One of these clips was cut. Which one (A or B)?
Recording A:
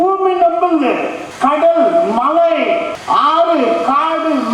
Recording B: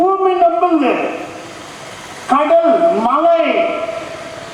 A